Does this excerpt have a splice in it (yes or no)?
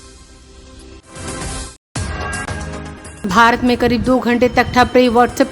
yes